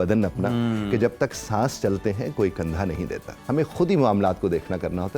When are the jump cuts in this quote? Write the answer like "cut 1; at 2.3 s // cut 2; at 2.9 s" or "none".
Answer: cut 1; at 3.3 s